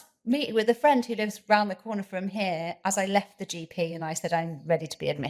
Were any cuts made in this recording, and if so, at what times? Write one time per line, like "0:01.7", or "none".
none

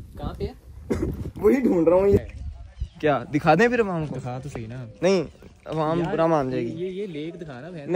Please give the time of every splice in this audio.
0:02.3

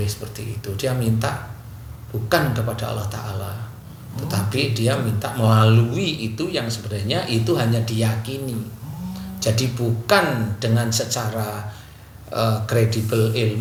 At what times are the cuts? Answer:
none

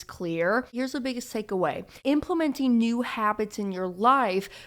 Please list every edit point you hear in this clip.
0:00.7
0:01.9

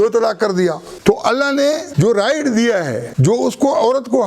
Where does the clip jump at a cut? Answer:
0:00.9
0:01.9
0:03.0

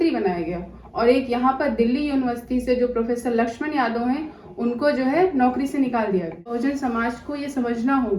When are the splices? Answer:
0:06.5

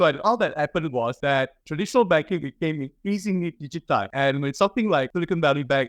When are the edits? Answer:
0:01.2
0:04.1
0:05.1

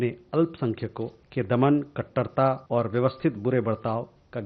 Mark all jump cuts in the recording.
0:01.2
0:02.6

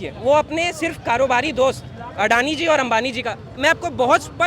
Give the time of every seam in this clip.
none

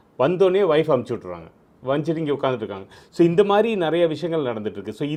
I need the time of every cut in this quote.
none

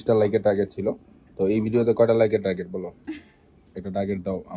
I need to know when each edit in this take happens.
none

